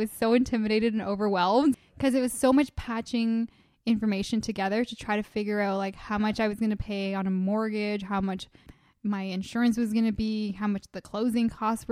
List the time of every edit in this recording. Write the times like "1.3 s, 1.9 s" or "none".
1.7 s